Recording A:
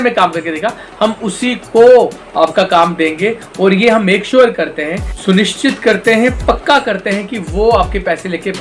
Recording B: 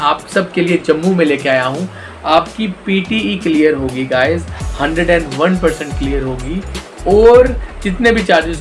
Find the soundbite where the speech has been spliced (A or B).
A